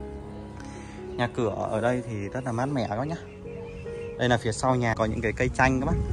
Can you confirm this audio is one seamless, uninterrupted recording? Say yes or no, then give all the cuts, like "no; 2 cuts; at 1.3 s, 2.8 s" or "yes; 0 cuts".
no; 1 cut; at 4.9 s